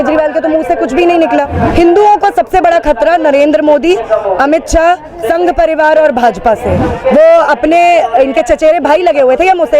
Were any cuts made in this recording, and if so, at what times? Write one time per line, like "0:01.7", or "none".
0:01.6
0:06.8